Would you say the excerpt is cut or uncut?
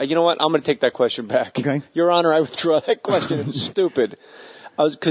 uncut